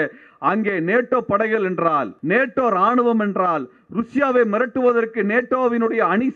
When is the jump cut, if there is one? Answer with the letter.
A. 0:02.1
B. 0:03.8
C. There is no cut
A